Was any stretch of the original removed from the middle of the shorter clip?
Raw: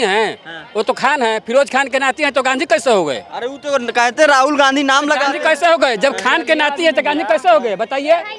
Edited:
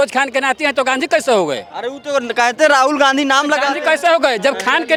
no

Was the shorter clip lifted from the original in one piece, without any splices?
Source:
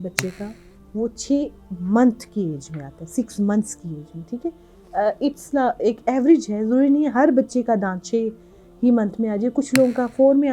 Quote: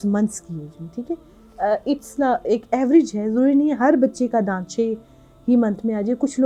yes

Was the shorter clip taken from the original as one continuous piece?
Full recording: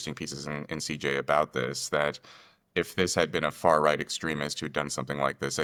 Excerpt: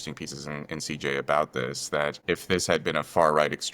no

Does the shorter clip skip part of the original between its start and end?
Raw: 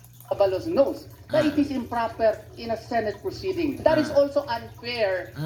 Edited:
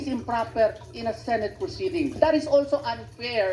no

